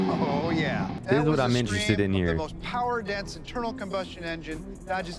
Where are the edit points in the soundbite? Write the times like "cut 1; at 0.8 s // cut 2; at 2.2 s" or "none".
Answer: cut 1; at 1.0 s